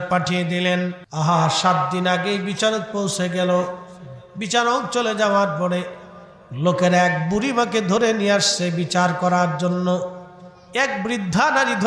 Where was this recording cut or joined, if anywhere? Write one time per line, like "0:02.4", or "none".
0:01.0